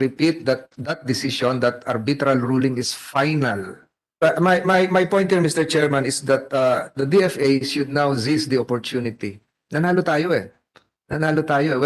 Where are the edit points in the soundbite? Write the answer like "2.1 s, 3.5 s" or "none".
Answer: 4.2 s